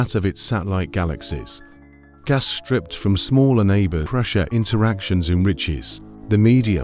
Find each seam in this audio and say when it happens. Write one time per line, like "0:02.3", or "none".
0:04.1